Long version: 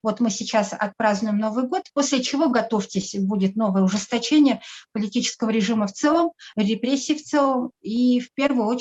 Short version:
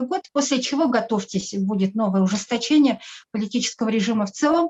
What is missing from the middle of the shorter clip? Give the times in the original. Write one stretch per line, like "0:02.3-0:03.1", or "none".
none